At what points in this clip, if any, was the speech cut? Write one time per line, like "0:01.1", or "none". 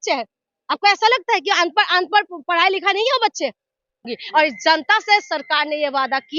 0:04.0

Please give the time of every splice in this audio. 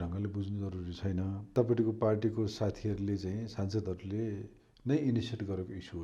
0:01.4

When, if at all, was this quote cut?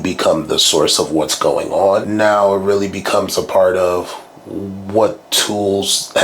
0:02.1

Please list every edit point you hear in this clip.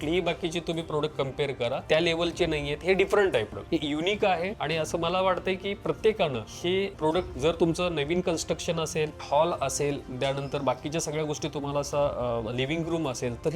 0:03.5

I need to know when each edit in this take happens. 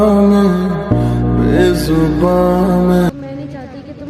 0:03.2

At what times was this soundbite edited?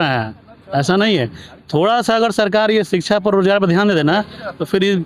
none

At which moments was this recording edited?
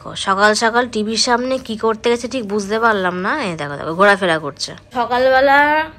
0:04.9

